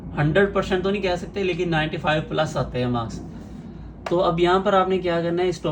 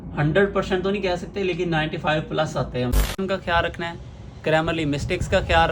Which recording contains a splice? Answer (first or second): second